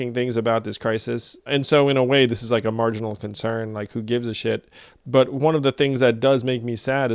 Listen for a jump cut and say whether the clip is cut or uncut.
cut